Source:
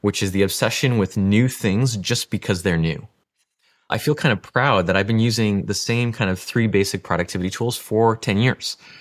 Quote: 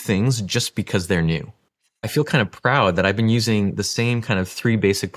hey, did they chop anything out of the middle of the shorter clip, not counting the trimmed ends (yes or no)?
yes